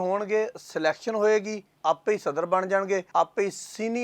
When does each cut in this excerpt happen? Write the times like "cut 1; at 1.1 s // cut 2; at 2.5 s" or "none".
cut 1; at 1.6 s // cut 2; at 3.1 s